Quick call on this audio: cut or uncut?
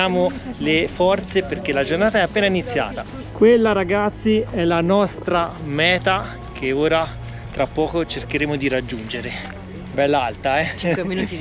cut